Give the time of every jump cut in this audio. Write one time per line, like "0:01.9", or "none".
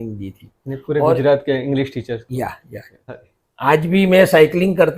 0:03.3